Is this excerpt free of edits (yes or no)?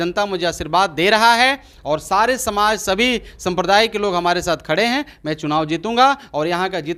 yes